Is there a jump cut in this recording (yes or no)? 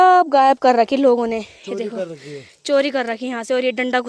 no